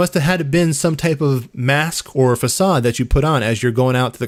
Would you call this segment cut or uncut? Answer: uncut